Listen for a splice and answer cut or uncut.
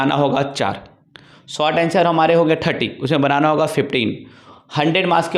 uncut